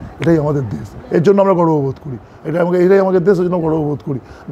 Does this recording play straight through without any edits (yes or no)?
yes